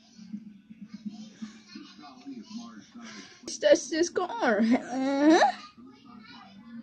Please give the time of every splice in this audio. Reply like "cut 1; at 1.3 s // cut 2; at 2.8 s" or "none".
cut 1; at 3.6 s